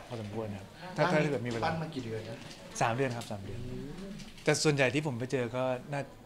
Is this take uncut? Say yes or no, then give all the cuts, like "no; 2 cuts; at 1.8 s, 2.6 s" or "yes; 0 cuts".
no; 1 cut; at 4.2 s